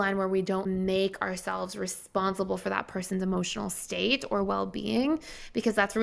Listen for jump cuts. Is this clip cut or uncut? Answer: uncut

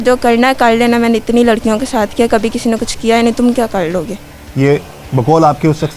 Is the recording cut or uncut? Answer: uncut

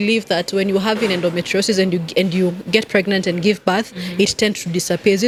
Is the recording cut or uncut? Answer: uncut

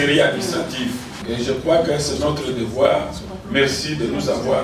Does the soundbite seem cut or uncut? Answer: cut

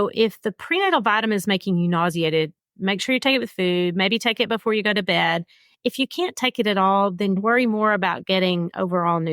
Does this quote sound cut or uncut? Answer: cut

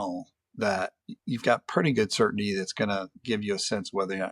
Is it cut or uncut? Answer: cut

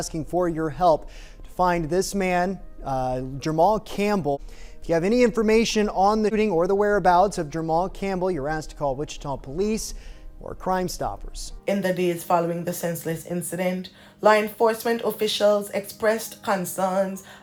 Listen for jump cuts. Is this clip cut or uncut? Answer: uncut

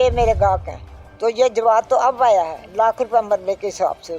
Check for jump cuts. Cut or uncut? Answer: cut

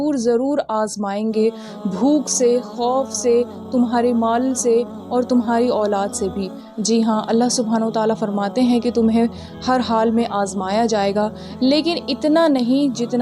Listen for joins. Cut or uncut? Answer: uncut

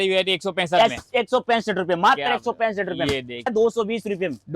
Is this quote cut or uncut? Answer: cut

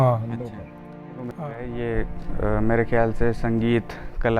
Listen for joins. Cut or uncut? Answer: cut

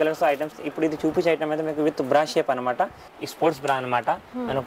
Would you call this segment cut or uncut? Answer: cut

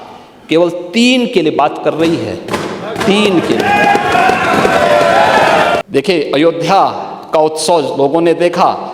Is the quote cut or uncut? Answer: cut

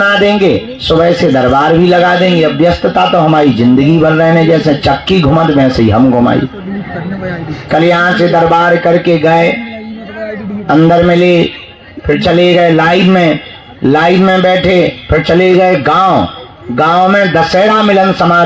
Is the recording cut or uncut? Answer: uncut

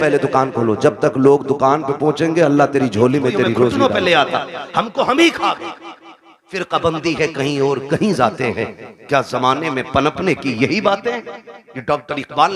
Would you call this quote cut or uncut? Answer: cut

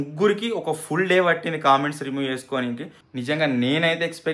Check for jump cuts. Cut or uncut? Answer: cut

